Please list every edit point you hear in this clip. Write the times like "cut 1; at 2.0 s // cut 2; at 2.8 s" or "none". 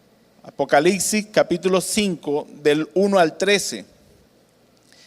cut 1; at 2.4 s